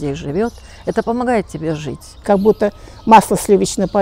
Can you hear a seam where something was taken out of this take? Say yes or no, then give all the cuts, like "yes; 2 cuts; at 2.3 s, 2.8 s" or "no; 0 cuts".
yes; 1 cut; at 2.2 s